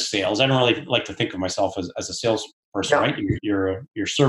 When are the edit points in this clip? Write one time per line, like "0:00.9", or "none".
none

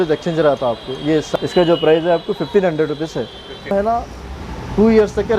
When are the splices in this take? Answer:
0:01.3
0:03.7

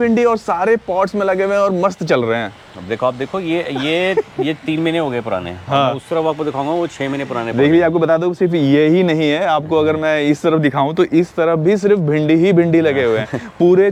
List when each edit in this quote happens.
none

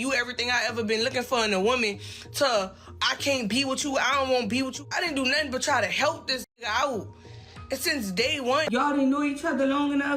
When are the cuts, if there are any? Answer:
0:04.8
0:08.6

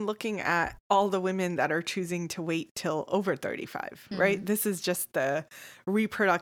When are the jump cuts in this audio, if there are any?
none

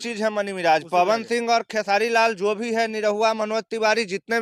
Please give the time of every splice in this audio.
none

